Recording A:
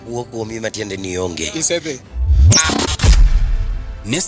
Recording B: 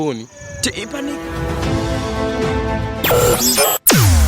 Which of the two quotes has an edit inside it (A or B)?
B